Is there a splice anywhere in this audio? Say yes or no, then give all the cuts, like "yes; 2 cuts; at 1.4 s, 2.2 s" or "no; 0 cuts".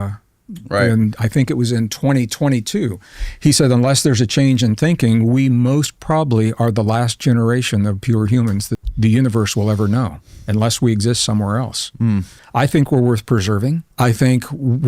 yes; 3 cuts; at 8.8 s, 12.4 s, 13.9 s